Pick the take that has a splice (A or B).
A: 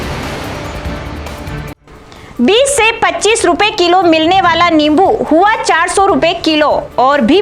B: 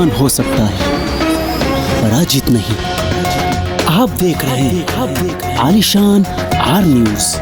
A